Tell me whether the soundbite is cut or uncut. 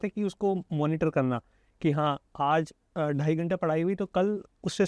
uncut